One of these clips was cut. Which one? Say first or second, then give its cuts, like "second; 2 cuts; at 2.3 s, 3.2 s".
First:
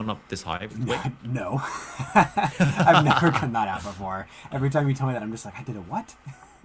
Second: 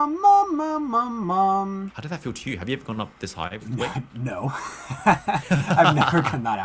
second; 1 cut; at 1.9 s